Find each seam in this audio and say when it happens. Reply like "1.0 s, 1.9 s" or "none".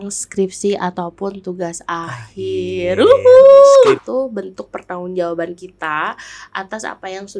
4.0 s